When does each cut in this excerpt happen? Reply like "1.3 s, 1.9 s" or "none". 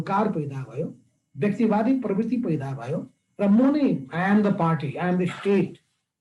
none